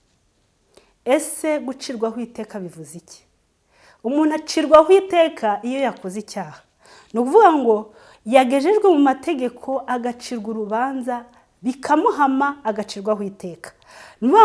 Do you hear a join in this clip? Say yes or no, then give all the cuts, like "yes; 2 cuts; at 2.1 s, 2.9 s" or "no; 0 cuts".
no; 0 cuts